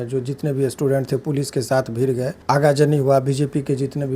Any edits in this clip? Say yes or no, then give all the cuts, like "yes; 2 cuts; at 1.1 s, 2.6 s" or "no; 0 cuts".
yes; 1 cut; at 2.3 s